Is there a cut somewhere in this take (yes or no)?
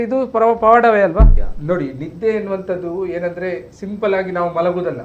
yes